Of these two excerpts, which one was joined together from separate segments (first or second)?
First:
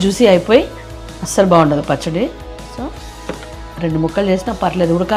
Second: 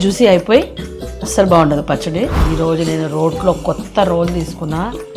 second